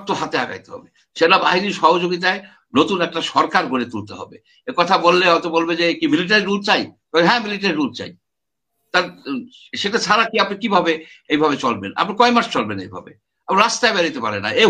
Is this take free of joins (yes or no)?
yes